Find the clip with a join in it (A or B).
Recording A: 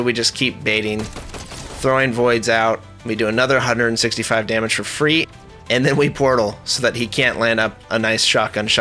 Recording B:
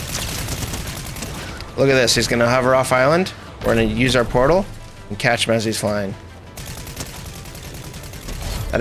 A